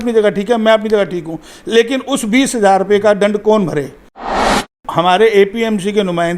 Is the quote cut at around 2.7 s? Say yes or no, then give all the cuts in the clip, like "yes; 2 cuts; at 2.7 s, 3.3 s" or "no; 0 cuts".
no; 1 cut; at 4.5 s